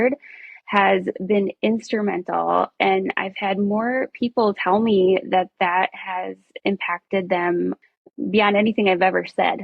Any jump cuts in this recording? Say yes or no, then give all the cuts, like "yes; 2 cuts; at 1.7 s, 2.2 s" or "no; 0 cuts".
yes; 1 cut; at 7.8 s